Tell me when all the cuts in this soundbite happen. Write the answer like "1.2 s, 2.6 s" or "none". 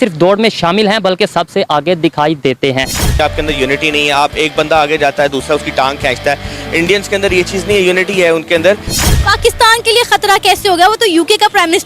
3.1 s, 8.9 s